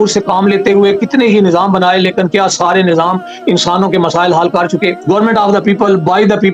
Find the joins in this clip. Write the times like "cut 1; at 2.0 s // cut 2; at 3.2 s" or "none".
cut 1; at 5.0 s

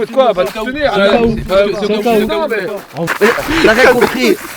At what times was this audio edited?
cut 1; at 3.1 s

